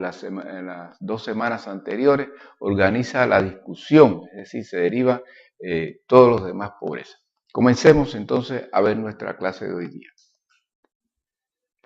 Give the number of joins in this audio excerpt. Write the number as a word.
one